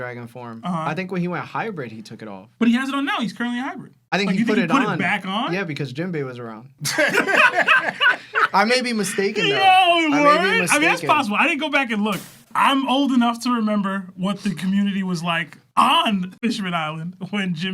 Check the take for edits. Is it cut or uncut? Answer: cut